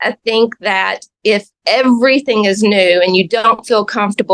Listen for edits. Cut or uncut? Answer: uncut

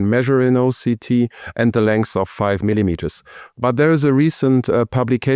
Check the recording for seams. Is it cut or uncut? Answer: uncut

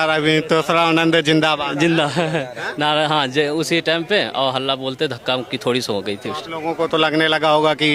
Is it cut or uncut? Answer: uncut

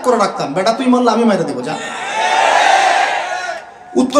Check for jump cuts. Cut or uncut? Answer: uncut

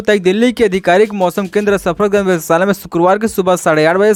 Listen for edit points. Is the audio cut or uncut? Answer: uncut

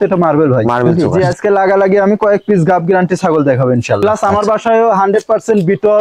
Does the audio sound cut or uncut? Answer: cut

